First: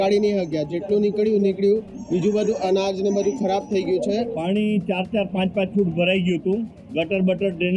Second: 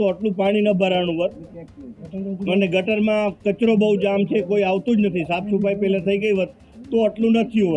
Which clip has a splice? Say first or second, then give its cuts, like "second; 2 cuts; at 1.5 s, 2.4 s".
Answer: first; 1 cut; at 4.3 s